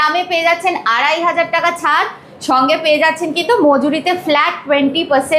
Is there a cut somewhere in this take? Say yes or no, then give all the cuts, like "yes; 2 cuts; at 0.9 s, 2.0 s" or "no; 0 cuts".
no; 0 cuts